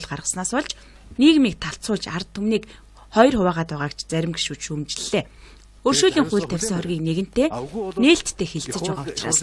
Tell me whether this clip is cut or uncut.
cut